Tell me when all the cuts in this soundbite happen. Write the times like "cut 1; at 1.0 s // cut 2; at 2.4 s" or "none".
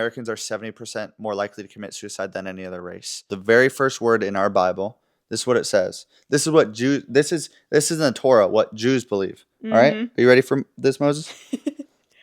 cut 1; at 3.3 s

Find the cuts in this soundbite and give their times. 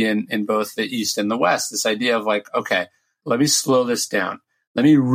cut 1; at 3.1 s

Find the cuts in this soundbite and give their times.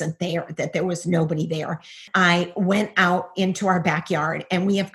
cut 1; at 2.1 s

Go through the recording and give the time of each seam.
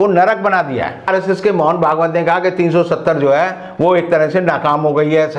cut 1; at 1.1 s

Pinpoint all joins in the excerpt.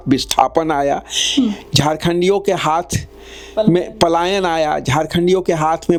none

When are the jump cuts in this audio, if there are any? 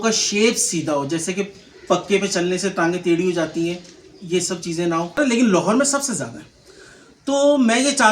cut 1; at 5.2 s

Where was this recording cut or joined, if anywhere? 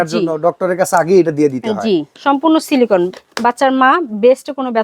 cut 1; at 2.1 s // cut 2; at 3.2 s

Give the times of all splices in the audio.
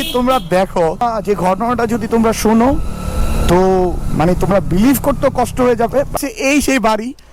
cut 1; at 1.0 s // cut 2; at 6.2 s

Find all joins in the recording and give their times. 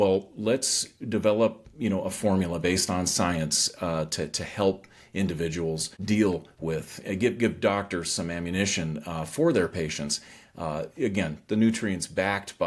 cut 1; at 5.9 s

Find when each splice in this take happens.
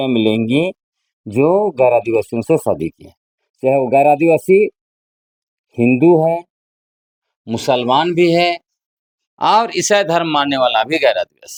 none

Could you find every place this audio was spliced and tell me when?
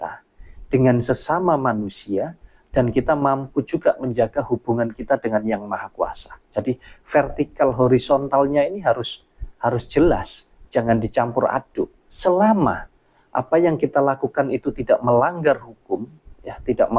cut 1; at 12.0 s

